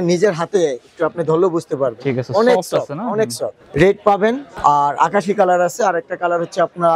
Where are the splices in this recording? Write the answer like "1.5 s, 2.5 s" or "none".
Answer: 3.5 s, 4.5 s

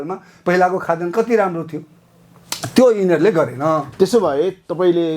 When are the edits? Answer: none

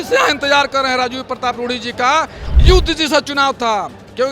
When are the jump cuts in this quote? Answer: 2.4 s

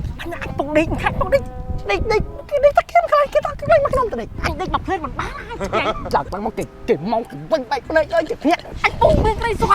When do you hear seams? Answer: 4.3 s, 8.8 s

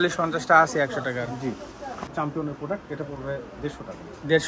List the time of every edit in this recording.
2.1 s

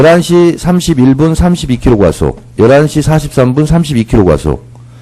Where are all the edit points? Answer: 4.1 s

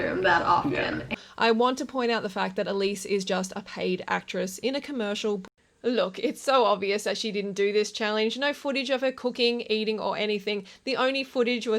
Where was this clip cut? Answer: 1.1 s, 5.4 s

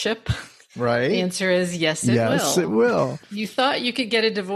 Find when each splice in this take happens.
3.2 s

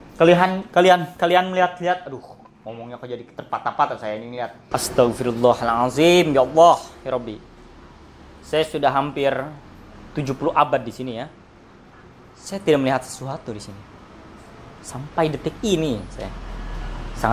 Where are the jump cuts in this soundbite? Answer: 4.6 s

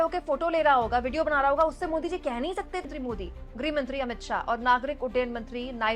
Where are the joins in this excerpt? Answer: 2.8 s

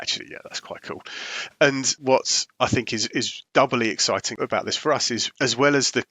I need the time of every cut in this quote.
1.9 s, 3.4 s, 4.3 s, 5.3 s

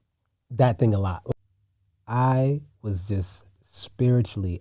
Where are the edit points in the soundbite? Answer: 1.3 s

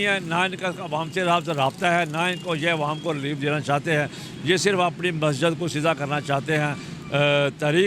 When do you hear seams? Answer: none

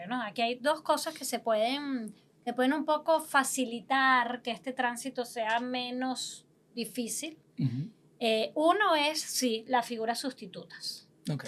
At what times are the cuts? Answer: none

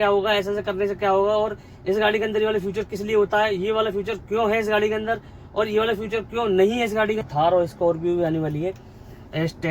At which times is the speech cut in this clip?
7.3 s

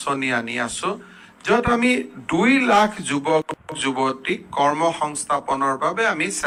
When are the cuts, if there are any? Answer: none

